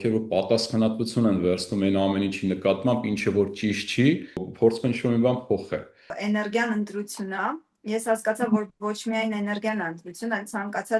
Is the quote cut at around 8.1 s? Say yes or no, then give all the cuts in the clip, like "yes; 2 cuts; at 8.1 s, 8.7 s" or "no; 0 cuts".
no; 2 cuts; at 4.5 s, 6.1 s